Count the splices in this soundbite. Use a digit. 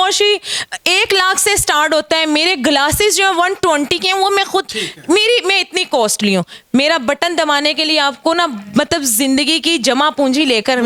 0